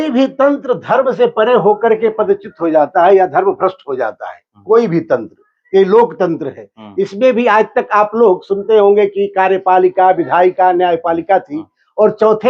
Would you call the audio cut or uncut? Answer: uncut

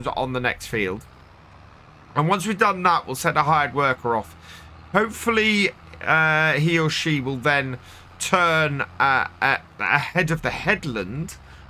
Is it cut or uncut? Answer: uncut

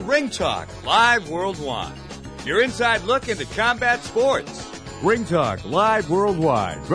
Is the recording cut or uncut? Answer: cut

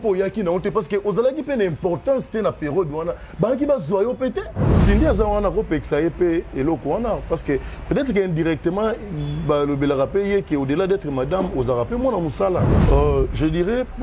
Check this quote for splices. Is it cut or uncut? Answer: cut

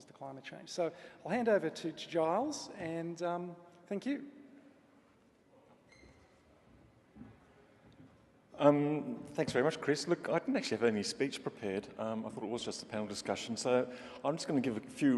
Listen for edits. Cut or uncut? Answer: cut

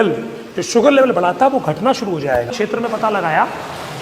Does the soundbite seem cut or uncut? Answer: cut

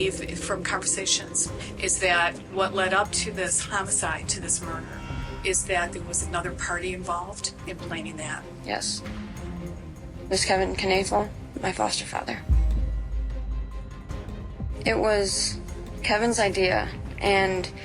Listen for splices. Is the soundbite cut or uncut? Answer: uncut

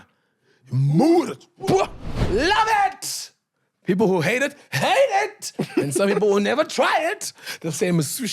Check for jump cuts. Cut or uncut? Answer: cut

